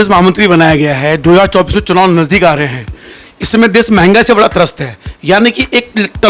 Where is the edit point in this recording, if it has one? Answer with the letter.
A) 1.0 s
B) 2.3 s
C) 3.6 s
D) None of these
D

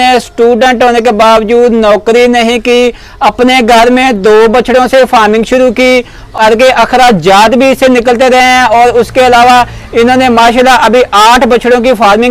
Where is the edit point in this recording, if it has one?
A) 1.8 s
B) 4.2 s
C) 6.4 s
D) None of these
C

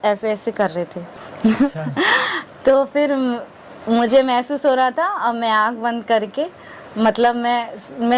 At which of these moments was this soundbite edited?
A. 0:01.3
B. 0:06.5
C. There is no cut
C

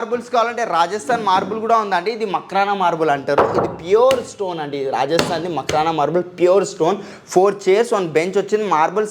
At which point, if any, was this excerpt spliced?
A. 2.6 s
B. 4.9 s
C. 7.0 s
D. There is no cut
D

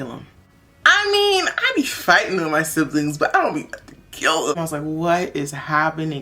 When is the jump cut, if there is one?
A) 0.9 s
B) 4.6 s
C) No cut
B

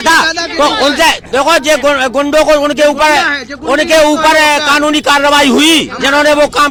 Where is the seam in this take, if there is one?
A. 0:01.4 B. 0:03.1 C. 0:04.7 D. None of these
D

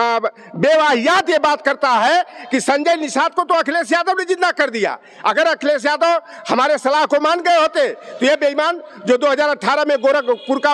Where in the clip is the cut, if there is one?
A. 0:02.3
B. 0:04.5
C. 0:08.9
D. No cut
D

